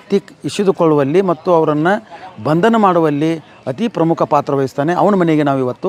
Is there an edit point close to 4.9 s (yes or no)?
no